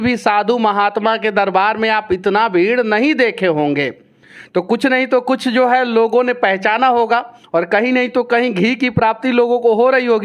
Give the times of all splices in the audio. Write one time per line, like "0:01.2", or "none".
none